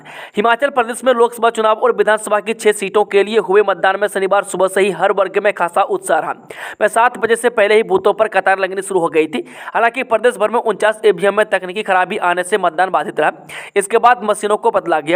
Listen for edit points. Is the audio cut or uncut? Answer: uncut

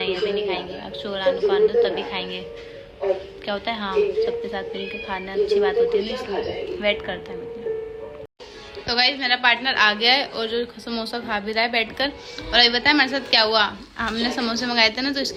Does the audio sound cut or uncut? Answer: uncut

